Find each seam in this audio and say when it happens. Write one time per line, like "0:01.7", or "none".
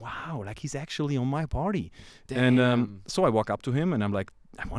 none